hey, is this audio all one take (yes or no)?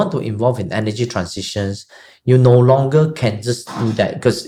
yes